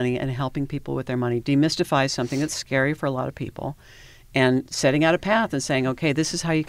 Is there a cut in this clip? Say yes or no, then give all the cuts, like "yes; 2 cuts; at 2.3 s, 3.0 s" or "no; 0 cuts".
no; 0 cuts